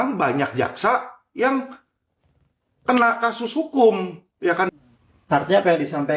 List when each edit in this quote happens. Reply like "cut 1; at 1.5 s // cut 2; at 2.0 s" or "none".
cut 1; at 4.7 s